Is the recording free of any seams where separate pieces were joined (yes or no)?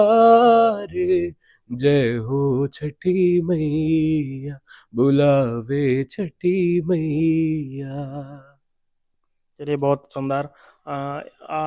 yes